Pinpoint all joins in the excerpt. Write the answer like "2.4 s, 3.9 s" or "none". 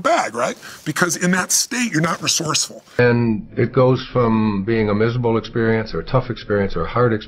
3.0 s